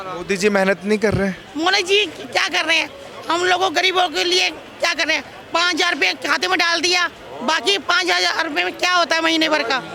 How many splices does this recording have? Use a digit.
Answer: 0